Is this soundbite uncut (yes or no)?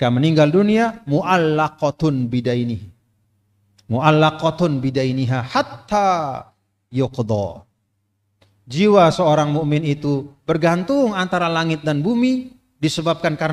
yes